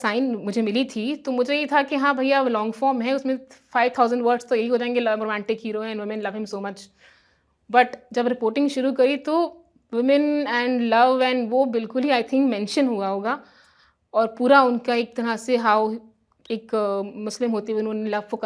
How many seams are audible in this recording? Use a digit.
0